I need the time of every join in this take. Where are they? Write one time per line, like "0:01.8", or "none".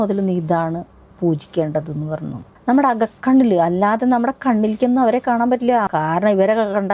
0:02.4
0:05.9